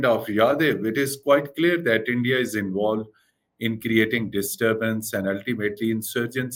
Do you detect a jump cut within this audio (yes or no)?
no